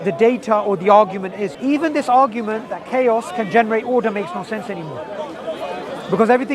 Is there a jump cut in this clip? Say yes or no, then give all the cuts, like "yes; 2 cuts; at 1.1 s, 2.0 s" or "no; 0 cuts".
yes; 1 cut; at 1.5 s